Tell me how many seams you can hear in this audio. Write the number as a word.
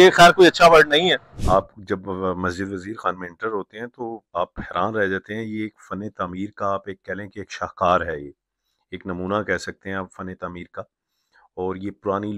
one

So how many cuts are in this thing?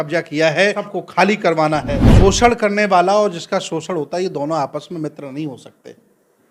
two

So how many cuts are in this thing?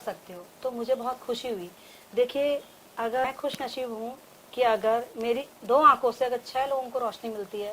one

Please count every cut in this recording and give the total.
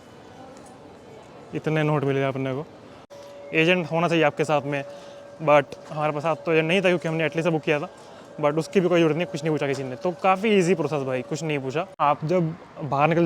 two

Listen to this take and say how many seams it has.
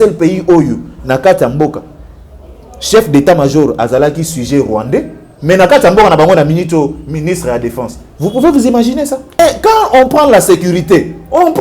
one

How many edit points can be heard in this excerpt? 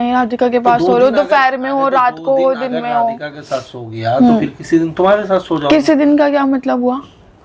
zero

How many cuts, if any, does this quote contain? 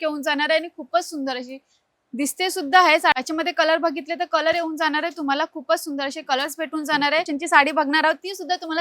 two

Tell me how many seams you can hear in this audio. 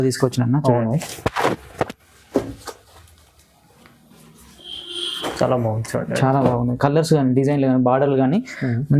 zero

